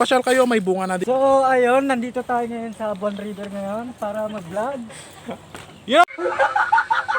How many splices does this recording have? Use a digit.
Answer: 2